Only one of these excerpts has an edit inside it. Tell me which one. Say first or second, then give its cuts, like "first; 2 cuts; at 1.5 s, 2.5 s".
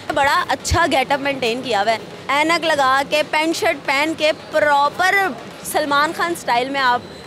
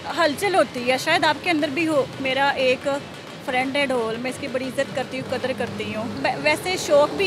second; 2 cuts; at 2.2 s, 6.2 s